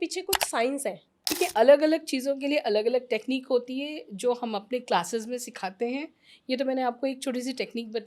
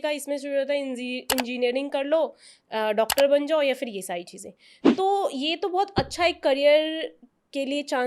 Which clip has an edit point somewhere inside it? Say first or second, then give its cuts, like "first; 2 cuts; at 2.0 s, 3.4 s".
first; 1 cut; at 1.4 s